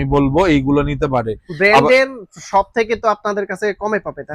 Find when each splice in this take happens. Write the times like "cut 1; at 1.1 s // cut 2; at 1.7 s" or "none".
none